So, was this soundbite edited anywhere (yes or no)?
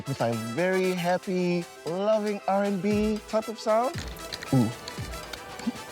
yes